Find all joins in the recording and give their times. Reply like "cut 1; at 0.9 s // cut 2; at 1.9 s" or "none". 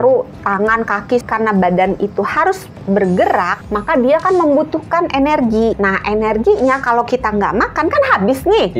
cut 1; at 1.2 s // cut 2; at 3.5 s // cut 3; at 5.8 s